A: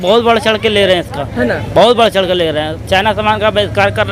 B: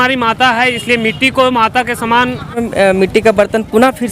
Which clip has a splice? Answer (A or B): B